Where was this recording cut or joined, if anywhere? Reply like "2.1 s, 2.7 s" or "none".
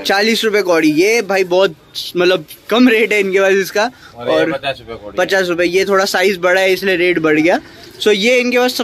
none

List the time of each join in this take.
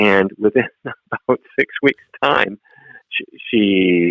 3.0 s

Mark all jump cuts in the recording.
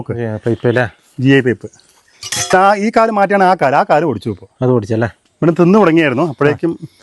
2.5 s, 5.2 s

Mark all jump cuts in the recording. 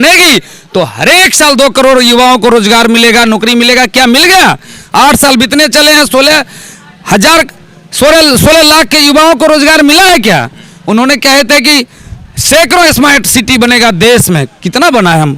none

